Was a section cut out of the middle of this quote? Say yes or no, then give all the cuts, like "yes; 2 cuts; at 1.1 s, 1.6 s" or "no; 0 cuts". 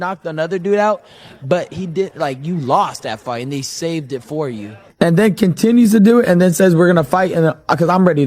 yes; 1 cut; at 4.8 s